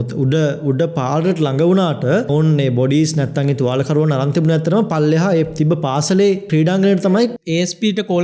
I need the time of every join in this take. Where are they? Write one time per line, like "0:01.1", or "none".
0:02.3
0:06.4
0:07.4